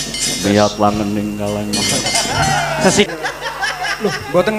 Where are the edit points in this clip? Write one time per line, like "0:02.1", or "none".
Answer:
0:03.1